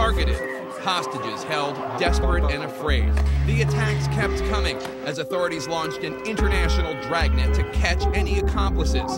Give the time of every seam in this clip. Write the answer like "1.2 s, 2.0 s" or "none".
6.6 s

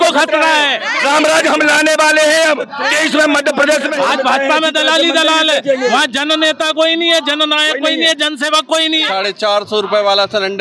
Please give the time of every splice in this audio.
0.9 s, 3.9 s, 9.1 s

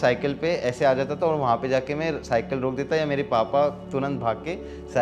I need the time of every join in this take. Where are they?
none

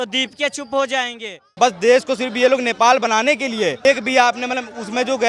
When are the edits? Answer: 1.4 s, 3.8 s

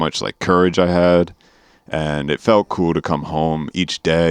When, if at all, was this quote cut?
none

